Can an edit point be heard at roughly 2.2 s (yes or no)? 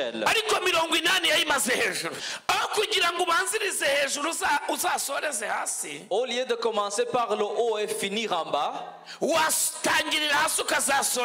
yes